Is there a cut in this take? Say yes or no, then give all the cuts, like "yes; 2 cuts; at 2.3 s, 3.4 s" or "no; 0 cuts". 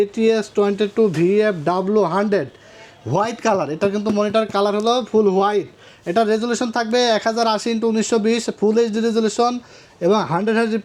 no; 0 cuts